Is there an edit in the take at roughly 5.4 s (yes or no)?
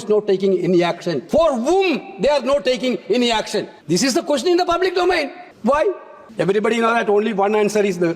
yes